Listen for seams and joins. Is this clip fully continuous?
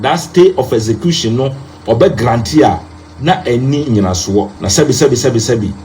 no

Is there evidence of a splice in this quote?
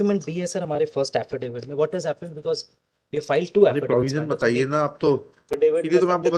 yes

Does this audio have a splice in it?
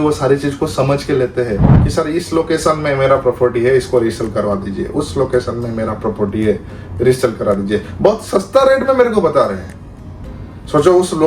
yes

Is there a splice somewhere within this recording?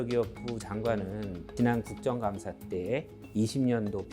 yes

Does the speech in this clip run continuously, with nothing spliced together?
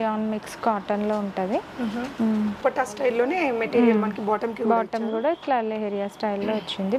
no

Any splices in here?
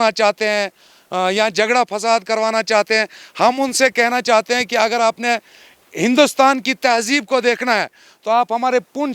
no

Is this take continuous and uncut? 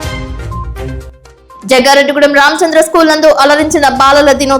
no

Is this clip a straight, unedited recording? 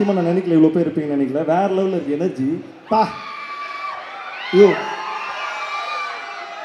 yes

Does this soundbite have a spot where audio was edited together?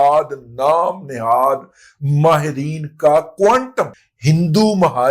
yes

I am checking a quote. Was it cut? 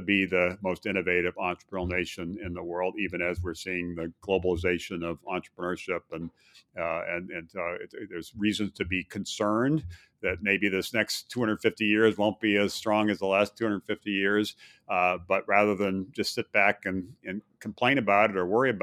no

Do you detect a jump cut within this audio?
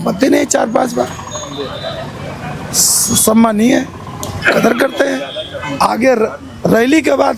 no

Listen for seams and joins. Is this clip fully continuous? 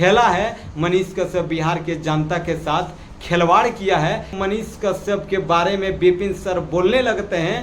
no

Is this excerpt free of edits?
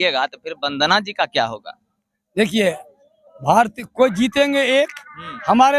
yes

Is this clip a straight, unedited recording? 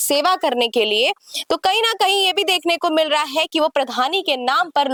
yes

